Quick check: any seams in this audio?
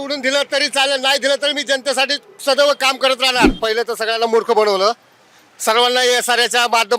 yes; 1 cut; at 3.5 s

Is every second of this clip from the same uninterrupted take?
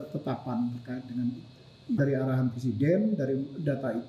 no; 1 cut; at 2.0 s

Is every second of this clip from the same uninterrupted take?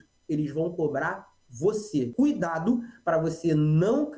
no; 1 cut; at 2.1 s

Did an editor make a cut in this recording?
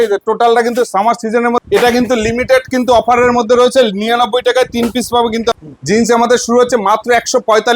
yes; 2 cuts; at 1.6 s, 5.5 s

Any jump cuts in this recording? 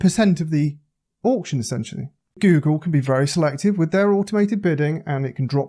yes; 1 cut; at 2.4 s

